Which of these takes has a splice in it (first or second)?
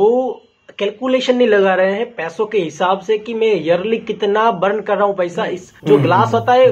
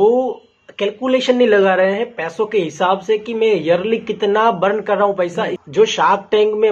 second